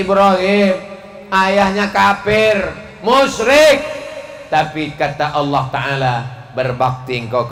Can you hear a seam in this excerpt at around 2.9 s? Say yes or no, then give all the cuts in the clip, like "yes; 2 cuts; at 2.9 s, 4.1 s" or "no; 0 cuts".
no; 0 cuts